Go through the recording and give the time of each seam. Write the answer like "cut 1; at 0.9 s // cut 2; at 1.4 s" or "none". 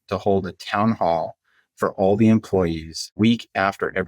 cut 1; at 3.1 s